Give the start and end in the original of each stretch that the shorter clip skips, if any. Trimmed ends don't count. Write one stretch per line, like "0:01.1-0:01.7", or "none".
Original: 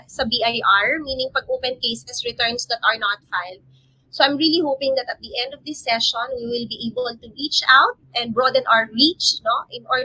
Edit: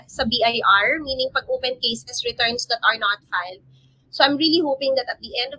none

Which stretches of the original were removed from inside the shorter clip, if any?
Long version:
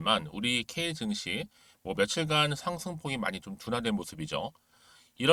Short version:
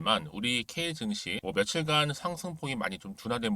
0:01.3-0:01.7

